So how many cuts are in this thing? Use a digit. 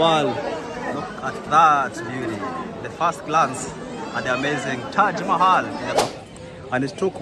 1